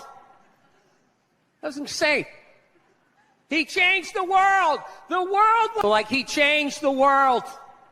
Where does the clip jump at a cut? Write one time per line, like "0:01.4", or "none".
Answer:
0:05.8